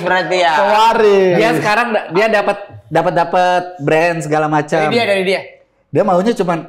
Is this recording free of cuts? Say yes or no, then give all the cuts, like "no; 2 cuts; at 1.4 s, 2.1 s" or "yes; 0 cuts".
yes; 0 cuts